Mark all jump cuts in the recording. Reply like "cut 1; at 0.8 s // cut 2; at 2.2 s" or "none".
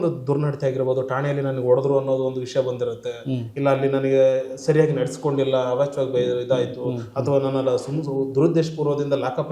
none